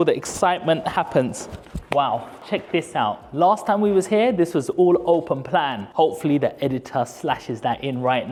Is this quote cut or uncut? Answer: uncut